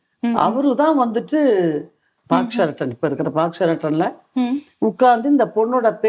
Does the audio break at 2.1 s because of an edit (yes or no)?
yes